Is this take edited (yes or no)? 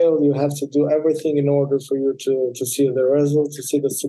no